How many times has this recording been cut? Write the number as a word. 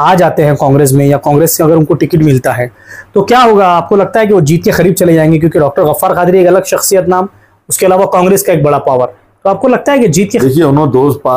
one